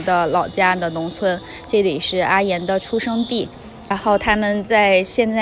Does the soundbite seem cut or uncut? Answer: cut